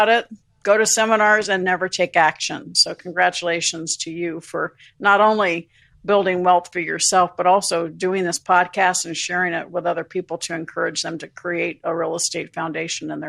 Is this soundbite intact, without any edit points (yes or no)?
yes